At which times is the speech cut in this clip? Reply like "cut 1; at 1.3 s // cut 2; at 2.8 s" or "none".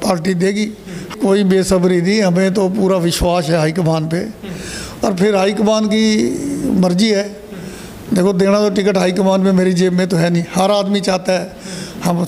cut 1; at 1.2 s